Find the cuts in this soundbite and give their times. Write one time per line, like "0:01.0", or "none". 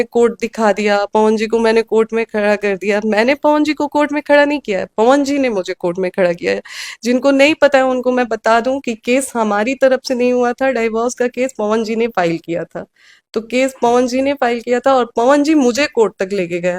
none